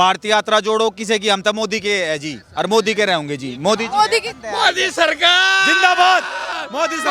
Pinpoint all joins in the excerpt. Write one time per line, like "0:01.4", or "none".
none